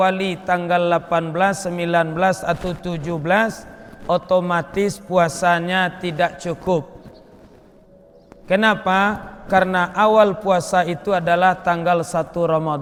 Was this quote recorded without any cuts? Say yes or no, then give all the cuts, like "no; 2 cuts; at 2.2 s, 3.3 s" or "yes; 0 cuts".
yes; 0 cuts